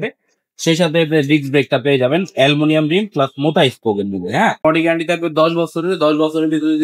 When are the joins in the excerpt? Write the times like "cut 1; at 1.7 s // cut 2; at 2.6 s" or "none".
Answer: cut 1; at 4.6 s